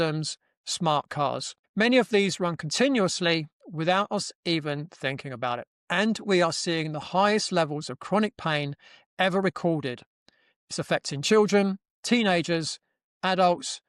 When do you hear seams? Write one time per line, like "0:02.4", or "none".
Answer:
0:01.6
0:05.7